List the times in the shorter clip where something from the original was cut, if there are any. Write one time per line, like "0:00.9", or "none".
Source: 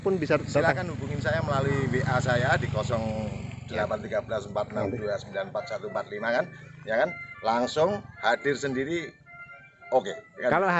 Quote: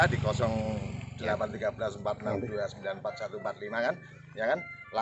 none